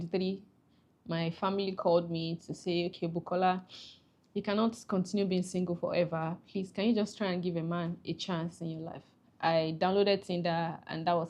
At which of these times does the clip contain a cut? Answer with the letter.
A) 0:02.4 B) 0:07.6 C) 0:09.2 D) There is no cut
C